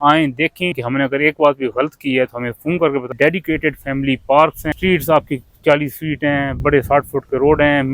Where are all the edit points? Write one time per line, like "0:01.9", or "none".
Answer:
0:00.8
0:03.1
0:04.6